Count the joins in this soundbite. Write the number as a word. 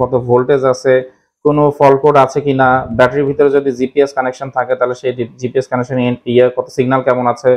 zero